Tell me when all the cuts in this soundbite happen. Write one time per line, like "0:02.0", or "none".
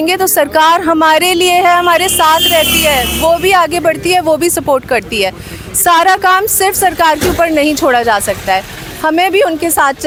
none